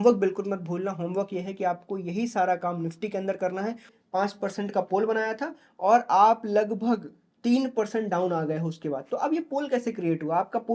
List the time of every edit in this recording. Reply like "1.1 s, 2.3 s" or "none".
3.9 s